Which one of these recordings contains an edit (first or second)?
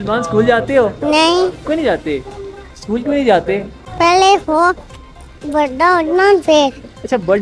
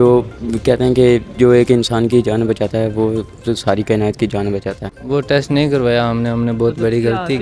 second